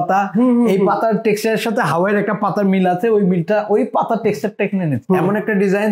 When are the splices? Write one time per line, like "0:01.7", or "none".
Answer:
0:05.0